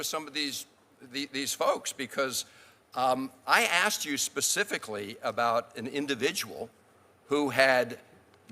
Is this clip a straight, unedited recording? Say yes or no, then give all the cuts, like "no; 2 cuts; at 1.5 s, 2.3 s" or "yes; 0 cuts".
yes; 0 cuts